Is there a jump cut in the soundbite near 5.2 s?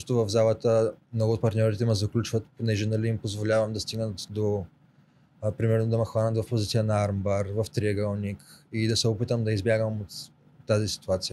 no; 0 cuts

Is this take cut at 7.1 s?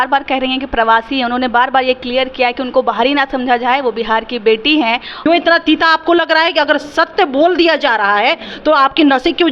no; 1 cut; at 5.1 s

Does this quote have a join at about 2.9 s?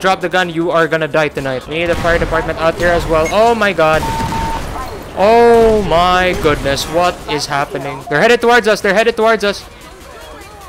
no; 2 cuts; at 1.6 s, 8.0 s

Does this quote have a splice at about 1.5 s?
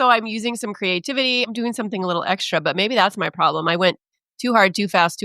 yes; 1 cut; at 1.5 s

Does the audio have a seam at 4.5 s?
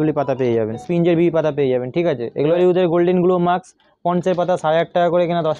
no; 2 cuts; at 0.8 s, 2.5 s

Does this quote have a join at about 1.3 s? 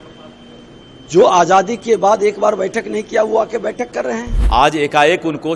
no; 1 cut; at 4.3 s

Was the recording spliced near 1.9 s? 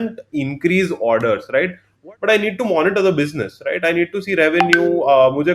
yes; 1 cut; at 1.9 s

